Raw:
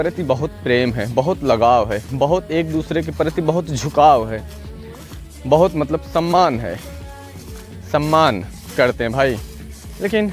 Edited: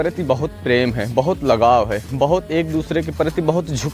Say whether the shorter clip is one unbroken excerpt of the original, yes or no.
yes